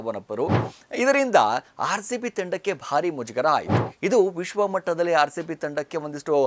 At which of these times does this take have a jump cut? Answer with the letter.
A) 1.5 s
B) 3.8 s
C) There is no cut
B